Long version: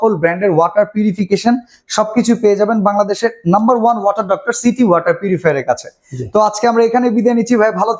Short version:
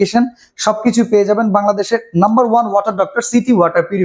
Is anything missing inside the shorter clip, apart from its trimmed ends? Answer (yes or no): no